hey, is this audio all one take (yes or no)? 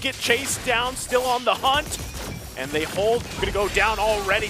no